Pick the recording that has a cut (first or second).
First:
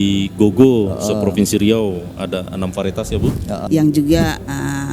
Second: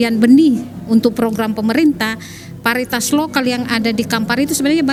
first